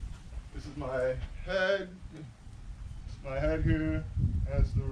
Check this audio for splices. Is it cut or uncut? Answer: uncut